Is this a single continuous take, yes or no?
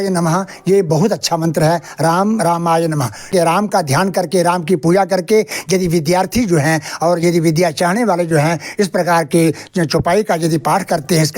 no